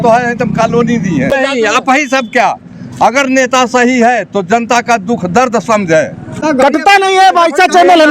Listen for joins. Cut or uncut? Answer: cut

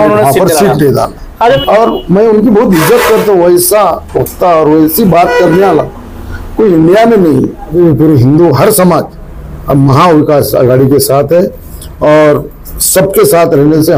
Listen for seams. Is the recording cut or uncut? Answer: cut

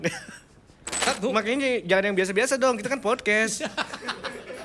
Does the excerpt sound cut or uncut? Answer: cut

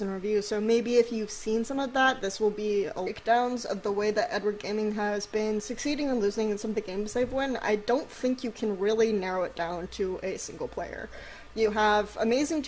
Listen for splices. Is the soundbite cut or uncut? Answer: uncut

